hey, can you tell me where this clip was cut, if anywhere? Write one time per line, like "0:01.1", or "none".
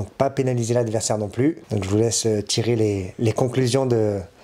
0:01.6